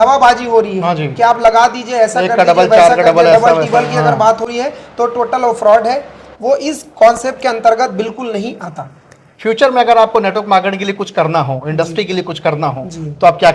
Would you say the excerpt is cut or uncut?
uncut